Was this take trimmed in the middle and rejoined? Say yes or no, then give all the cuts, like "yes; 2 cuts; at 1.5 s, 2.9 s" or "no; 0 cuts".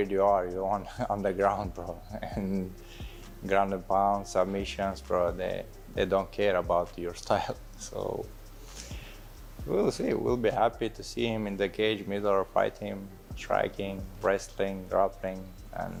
no; 0 cuts